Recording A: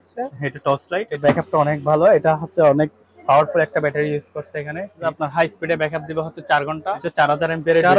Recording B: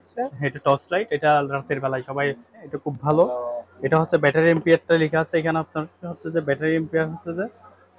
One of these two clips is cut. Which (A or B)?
A